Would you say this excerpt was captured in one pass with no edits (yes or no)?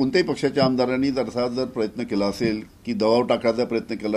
no